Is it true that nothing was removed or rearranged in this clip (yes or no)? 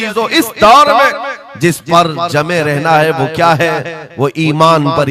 yes